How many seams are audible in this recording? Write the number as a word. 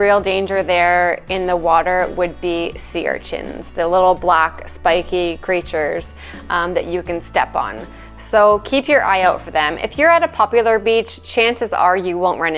zero